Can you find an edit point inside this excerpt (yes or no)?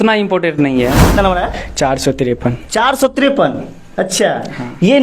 yes